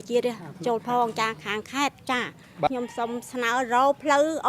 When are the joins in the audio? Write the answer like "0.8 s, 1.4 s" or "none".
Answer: 2.7 s